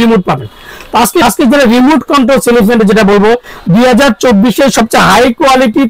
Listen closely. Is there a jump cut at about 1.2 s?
yes; 1 cut; at 1.2 s

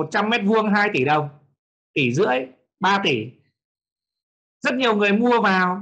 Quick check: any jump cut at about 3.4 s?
no; 0 cuts

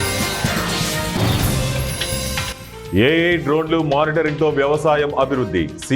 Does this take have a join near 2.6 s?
yes; 1 cut; at 2.6 s

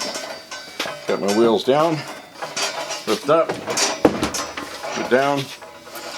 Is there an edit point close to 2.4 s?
yes; 1 cut; at 2.4 s

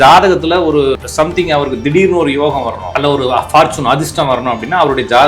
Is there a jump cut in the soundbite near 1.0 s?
yes; 1 cut; at 1.0 s

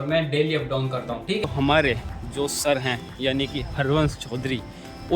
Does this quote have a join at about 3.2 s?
no; 1 cut; at 1.4 s

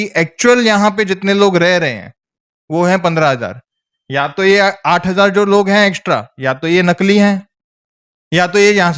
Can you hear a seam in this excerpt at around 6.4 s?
no; 0 cuts

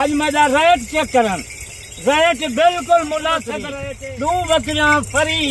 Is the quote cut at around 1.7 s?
no; 1 cut; at 3.6 s

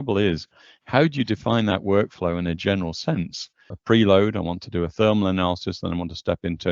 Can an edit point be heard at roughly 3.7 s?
yes; 1 cut; at 3.7 s

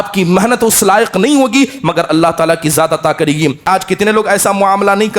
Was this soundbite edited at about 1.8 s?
no; 1 cut; at 3.6 s

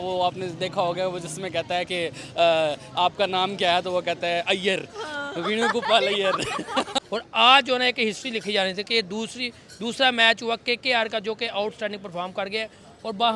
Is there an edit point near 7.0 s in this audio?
yes; 1 cut; at 7.0 s

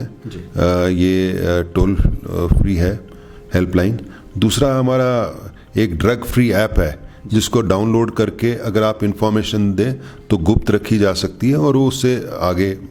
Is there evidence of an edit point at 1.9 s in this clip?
no; 0 cuts

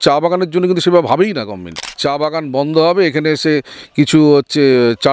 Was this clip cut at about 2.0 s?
yes; 1 cut; at 2.0 s

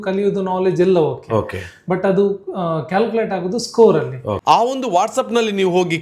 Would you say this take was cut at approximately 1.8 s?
no; 1 cut; at 4.3 s

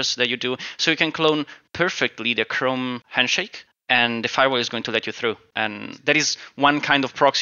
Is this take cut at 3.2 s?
yes; 2 cuts; at 3.2 s, 5.5 s

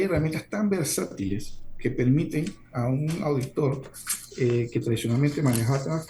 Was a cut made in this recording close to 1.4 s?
no; 0 cuts

